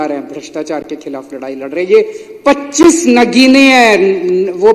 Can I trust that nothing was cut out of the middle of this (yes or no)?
yes